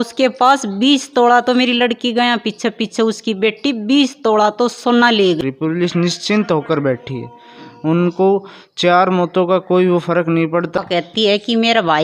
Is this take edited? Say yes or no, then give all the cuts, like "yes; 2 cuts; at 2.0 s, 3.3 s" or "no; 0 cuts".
yes; 2 cuts; at 5.4 s, 10.7 s